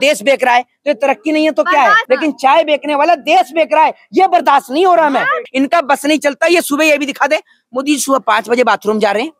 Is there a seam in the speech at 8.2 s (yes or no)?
no